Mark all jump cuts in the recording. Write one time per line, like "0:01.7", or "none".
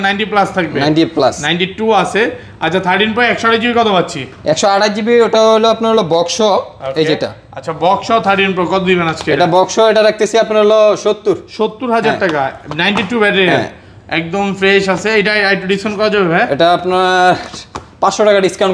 none